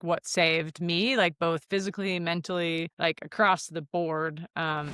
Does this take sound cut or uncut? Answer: cut